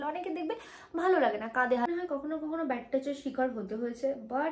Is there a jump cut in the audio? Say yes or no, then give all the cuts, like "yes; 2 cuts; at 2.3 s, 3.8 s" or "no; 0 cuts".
yes; 1 cut; at 1.9 s